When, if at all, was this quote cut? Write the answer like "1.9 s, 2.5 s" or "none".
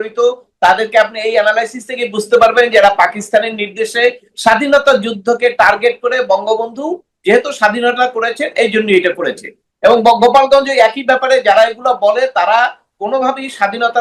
none